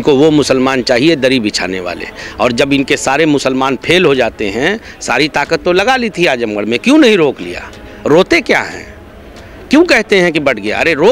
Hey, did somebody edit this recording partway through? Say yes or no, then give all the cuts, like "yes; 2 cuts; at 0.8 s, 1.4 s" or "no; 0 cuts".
no; 0 cuts